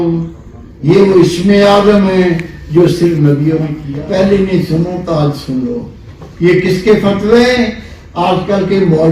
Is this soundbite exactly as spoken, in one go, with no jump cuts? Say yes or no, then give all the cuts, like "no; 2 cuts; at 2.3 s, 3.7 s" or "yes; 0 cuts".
no; 1 cut; at 3.7 s